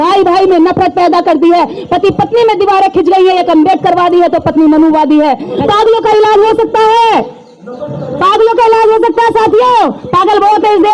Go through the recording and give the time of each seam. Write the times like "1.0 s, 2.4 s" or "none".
5.6 s